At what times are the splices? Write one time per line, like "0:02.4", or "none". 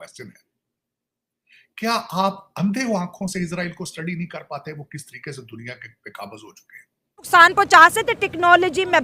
0:07.3